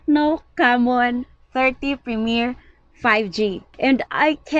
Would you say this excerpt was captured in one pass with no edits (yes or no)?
yes